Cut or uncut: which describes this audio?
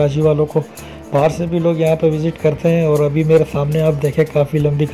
uncut